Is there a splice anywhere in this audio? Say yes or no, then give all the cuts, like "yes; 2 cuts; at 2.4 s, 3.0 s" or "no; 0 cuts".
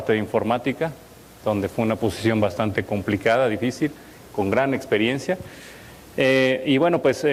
no; 0 cuts